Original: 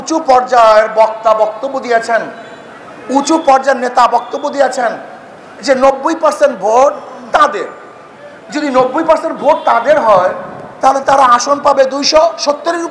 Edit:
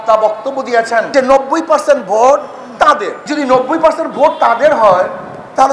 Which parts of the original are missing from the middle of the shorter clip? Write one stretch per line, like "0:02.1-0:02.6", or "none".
0:02.3-0:05.6
0:07.7-0:08.4